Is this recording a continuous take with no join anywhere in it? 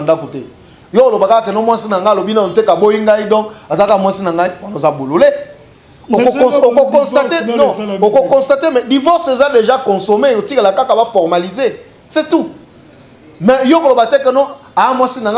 yes; 0 cuts

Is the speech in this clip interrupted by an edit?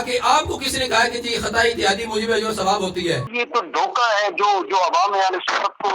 yes; 1 cut; at 3.3 s

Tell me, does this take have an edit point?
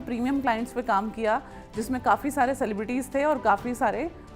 no; 0 cuts

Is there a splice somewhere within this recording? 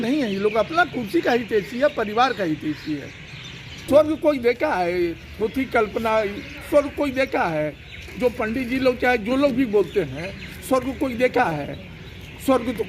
yes; 1 cut; at 3.8 s

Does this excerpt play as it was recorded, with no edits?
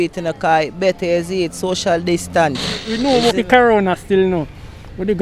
no; 1 cut; at 2.9 s

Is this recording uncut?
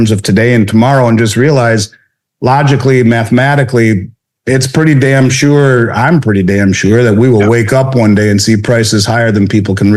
yes; 0 cuts

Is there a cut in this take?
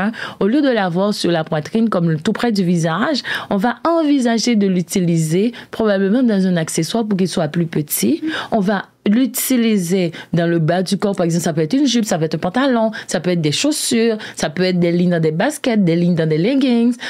no; 0 cuts

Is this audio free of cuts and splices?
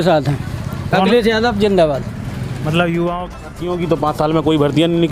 no; 1 cut; at 3.4 s

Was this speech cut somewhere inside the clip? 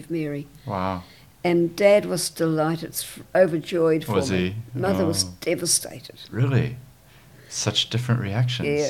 no; 0 cuts

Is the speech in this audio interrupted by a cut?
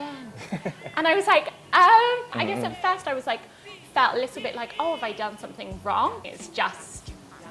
yes; 2 cuts; at 2.3 s, 6.2 s

